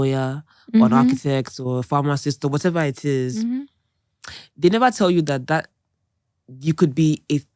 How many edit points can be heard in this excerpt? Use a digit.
0